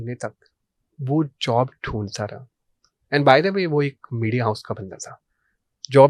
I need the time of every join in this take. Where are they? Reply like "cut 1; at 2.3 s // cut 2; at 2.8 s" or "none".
none

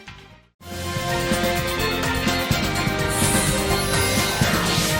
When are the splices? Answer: none

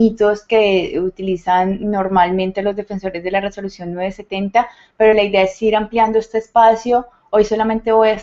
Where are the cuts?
cut 1; at 5.0 s

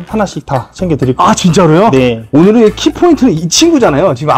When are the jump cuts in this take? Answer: cut 1; at 2.3 s

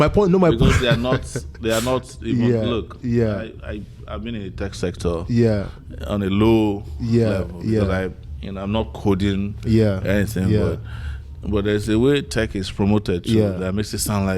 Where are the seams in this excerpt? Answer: none

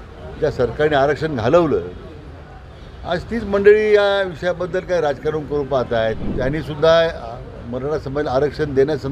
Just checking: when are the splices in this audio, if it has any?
cut 1; at 6.3 s

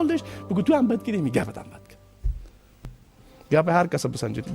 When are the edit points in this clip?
cut 1; at 2.7 s

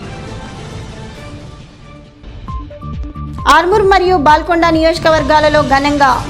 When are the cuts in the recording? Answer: cut 1; at 3.2 s

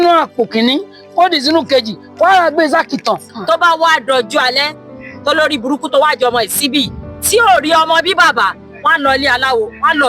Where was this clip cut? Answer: cut 1; at 3.3 s

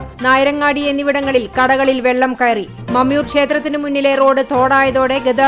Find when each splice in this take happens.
none

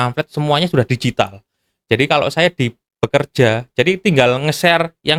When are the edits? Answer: none

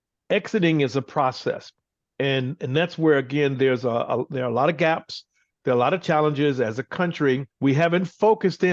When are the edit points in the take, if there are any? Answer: cut 1; at 7.5 s

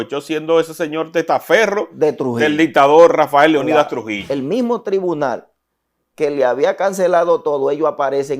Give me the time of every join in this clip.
cut 1; at 4.2 s

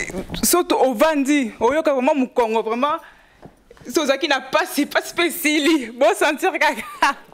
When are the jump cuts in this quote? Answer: none

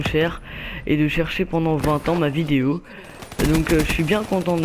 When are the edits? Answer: cut 1; at 2.8 s

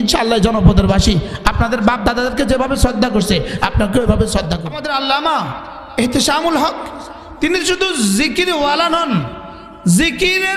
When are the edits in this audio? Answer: cut 1; at 4.8 s

